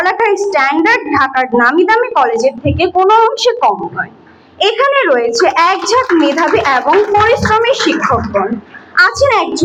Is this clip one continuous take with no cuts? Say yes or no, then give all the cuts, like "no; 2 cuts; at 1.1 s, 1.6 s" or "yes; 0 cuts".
yes; 0 cuts